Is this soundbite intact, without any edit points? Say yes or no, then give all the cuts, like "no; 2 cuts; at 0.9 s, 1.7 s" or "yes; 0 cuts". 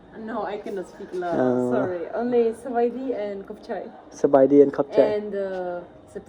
yes; 0 cuts